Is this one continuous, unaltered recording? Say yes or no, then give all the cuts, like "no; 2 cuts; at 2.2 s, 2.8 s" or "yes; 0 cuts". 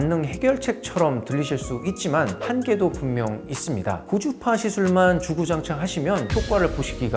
no; 1 cut; at 4.1 s